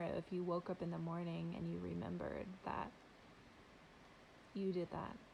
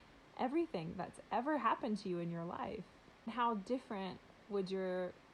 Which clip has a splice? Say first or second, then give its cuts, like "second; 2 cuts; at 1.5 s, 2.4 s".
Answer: second; 1 cut; at 3.3 s